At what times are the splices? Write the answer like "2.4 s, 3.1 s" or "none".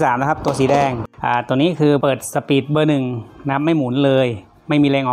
1.1 s, 2.0 s